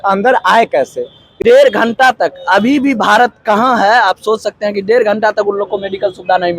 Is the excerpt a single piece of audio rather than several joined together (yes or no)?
no